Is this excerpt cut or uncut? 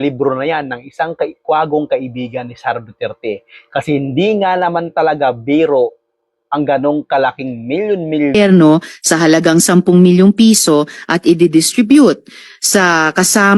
cut